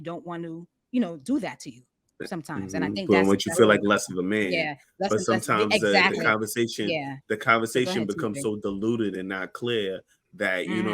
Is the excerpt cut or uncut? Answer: uncut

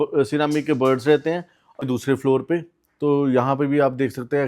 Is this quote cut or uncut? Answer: cut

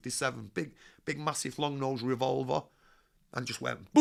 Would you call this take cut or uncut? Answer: uncut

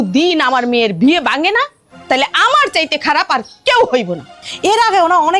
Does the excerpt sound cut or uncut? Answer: uncut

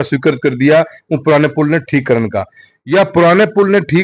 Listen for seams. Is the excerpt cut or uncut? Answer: uncut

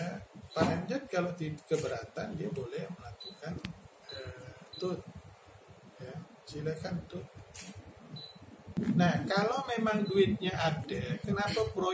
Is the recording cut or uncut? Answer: cut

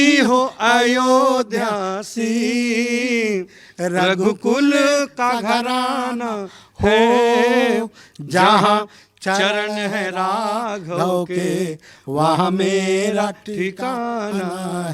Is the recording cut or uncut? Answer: uncut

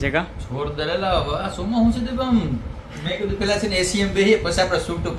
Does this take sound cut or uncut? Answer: uncut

